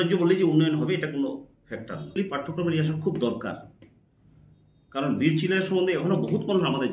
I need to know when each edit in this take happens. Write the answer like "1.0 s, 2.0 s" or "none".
2.2 s